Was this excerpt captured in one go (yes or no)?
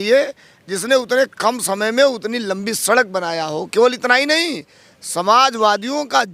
yes